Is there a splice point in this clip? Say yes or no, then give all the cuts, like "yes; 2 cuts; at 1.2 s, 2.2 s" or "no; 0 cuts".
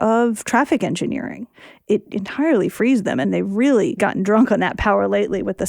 yes; 3 cuts; at 1.9 s, 3.2 s, 4.0 s